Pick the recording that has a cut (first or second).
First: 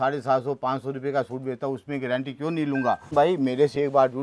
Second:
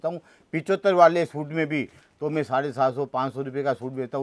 first